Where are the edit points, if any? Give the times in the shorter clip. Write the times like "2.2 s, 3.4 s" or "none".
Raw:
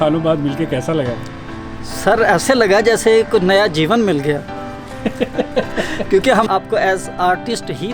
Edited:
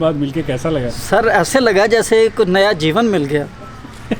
0.9 s